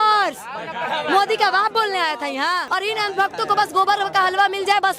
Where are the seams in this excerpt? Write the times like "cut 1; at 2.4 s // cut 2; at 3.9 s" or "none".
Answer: cut 1; at 2.7 s